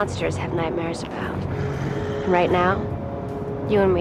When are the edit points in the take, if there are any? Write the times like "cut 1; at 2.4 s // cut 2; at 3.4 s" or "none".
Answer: none